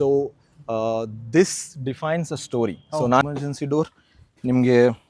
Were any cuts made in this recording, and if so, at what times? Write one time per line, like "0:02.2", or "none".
0:03.2

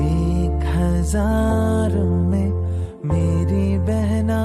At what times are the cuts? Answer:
none

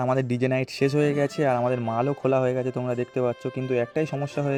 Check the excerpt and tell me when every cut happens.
none

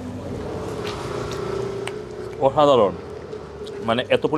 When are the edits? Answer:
0:00.9

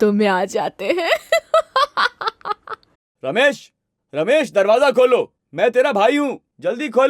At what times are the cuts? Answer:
0:03.0

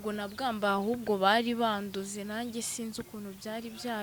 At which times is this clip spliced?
none

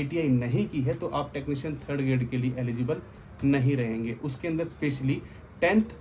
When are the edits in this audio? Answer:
none

